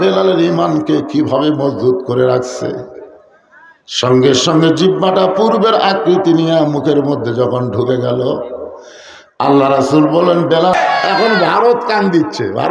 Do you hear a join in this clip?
yes; 1 cut; at 10.7 s

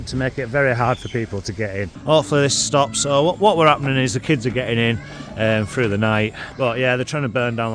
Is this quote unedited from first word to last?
no; 2 cuts; at 1.9 s, 6.4 s

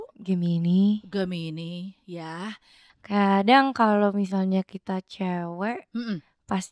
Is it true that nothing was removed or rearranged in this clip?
no; 1 cut; at 2.9 s

